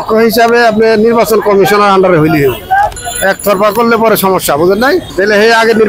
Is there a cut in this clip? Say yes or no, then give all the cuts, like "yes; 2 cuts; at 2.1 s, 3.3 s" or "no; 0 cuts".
yes; 2 cuts; at 3.0 s, 5.1 s